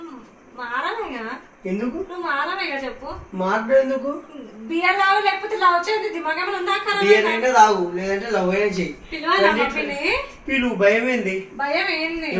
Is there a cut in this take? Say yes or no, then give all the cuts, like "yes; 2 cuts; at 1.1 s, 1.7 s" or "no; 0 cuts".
no; 0 cuts